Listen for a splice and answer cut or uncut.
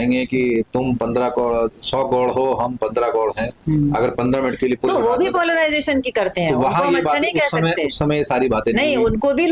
uncut